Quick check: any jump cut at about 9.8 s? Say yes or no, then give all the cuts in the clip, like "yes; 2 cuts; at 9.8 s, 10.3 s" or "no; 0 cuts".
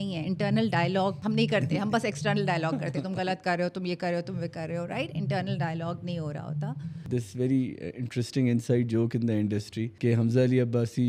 yes; 3 cuts; at 1.2 s, 7.0 s, 9.8 s